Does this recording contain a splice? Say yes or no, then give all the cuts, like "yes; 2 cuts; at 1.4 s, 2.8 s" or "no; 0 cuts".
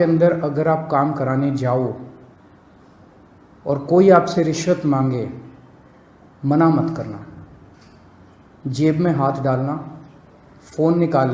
no; 0 cuts